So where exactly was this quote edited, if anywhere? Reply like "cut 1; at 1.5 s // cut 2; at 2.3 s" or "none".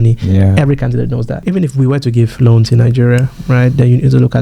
cut 1; at 1.3 s